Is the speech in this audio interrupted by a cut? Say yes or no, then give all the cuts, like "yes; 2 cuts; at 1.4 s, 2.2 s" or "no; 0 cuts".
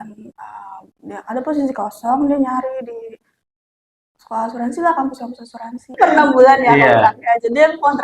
yes; 1 cut; at 6.0 s